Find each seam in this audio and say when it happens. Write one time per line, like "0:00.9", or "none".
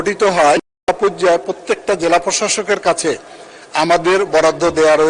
none